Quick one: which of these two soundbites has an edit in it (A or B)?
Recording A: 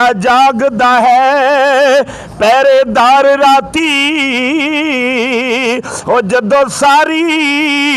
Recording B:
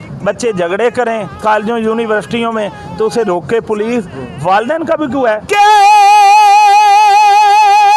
B